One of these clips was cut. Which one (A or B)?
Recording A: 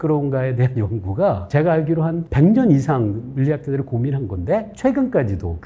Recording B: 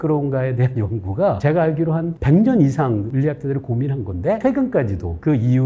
B